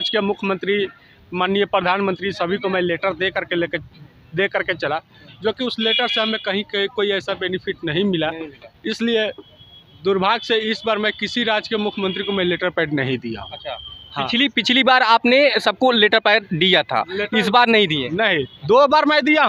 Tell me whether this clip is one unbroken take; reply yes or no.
yes